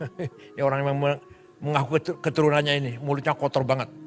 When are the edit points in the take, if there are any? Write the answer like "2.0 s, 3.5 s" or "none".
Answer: none